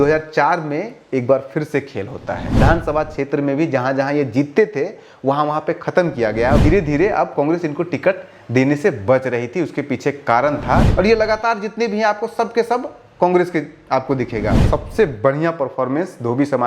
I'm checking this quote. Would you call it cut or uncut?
cut